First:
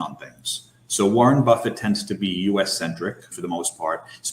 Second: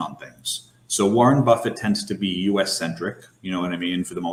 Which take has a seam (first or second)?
first